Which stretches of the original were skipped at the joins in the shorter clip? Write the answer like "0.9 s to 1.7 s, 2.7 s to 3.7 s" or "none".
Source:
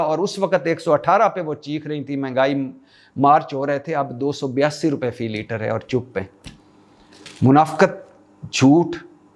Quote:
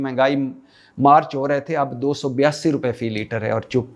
none